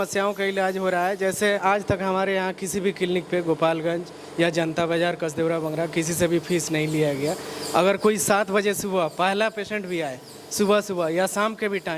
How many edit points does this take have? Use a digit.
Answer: 1